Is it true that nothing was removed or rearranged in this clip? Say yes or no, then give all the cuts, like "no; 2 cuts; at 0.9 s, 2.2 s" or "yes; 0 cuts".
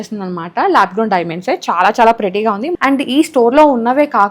no; 1 cut; at 2.7 s